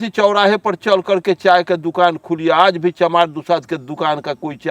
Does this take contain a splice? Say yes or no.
no